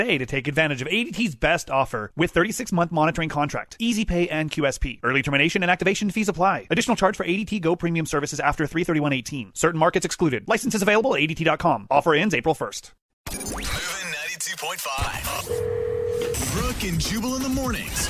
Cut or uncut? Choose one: cut